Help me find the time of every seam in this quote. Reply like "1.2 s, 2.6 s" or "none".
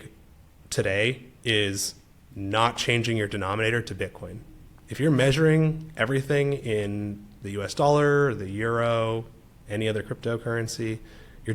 none